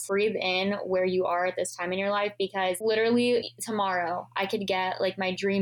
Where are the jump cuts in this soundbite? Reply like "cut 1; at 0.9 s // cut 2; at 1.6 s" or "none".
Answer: none